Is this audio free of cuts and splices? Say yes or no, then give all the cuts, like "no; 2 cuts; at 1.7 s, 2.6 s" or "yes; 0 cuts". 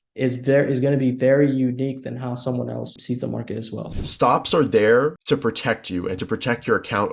no; 3 cuts; at 3.0 s, 3.8 s, 5.2 s